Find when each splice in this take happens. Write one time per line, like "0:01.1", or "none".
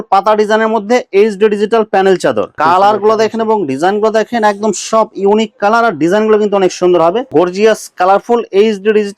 0:02.5
0:07.2

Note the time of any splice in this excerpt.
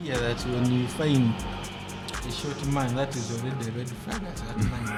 none

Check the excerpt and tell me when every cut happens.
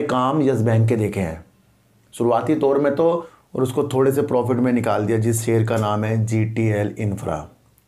0:03.1

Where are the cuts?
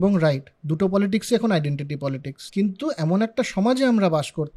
0:02.3

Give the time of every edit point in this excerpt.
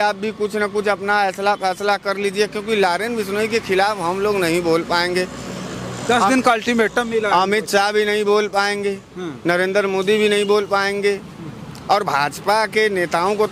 none

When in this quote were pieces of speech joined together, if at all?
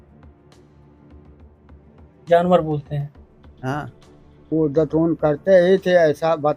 0:04.3

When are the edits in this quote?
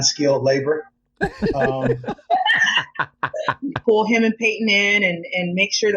0:03.7

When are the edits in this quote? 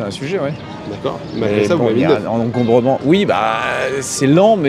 none

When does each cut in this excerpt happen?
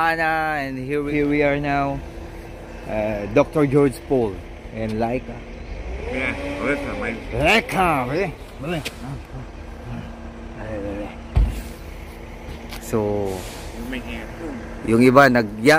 0:01.1

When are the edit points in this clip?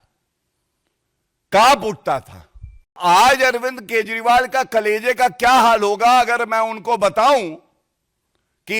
0:02.9

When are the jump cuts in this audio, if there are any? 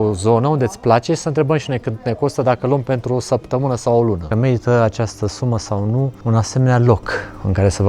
0:04.3
0:06.2

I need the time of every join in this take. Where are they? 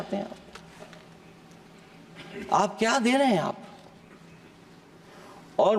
none

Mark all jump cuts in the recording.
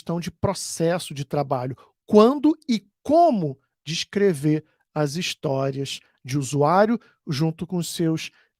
none

